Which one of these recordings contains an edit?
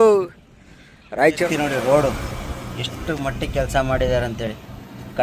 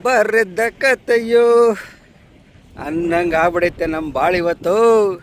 first; 1 cut; at 1.4 s

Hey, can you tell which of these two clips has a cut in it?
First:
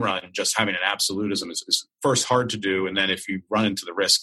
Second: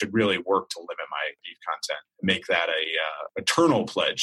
second; 2 cuts; at 1.8 s, 3.3 s

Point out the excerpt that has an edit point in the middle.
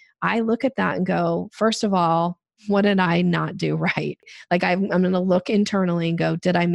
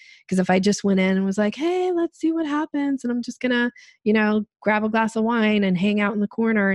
first; 2 cuts; at 2.5 s, 4.2 s

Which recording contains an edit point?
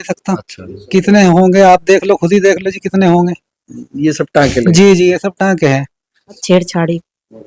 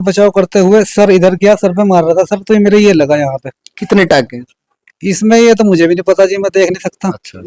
first; 1 cut; at 6.4 s

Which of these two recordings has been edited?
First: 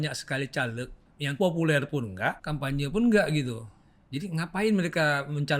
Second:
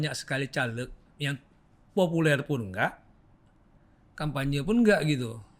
first; 2 cuts; at 1.3 s, 2.5 s

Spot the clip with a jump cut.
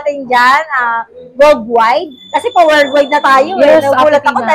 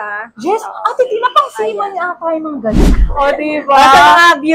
second; 1 cut; at 2.9 s

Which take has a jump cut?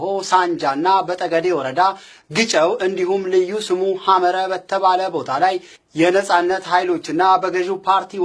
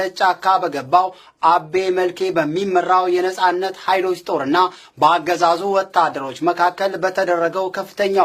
second; 1 cut; at 0.9 s

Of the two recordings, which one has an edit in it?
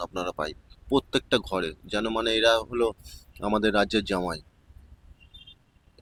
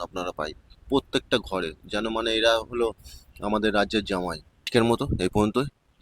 second; 1 cut; at 4.7 s

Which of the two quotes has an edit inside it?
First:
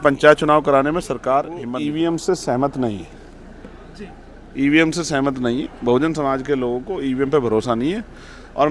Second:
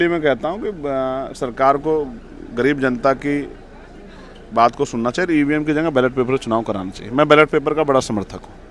first; 1 cut; at 1.6 s

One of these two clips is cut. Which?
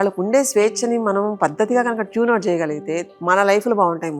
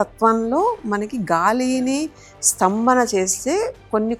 first; 1 cut; at 3.1 s

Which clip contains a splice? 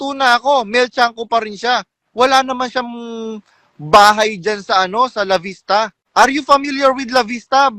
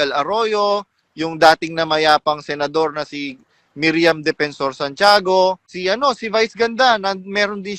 second; 1 cut; at 5.7 s

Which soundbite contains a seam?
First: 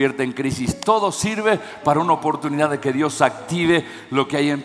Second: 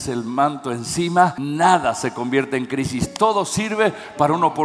second; 1 cut; at 1.4 s

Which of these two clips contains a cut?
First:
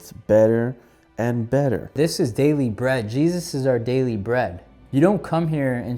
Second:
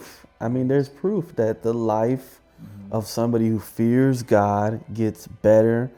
first; 2 cuts; at 1.9 s, 4.7 s

